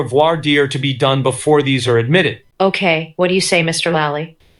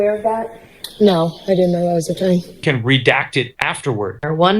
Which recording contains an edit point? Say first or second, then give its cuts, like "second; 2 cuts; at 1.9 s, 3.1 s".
second; 1 cut; at 2.6 s